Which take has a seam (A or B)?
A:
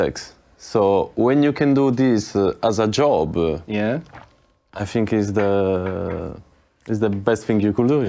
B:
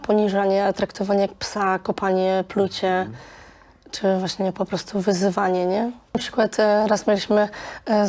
B